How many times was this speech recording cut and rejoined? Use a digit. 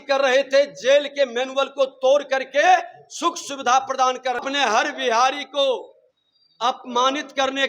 1